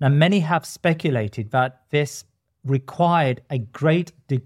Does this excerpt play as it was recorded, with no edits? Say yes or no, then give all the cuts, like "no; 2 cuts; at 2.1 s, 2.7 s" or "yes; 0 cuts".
yes; 0 cuts